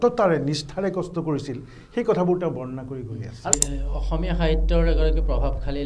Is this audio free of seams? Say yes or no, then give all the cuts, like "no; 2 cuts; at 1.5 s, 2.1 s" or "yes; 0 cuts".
no; 1 cut; at 3.5 s